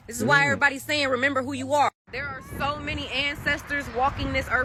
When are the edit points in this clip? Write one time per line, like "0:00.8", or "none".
none